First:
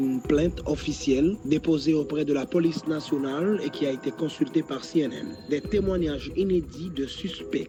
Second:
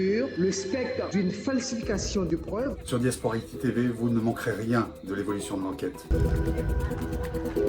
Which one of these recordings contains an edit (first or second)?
second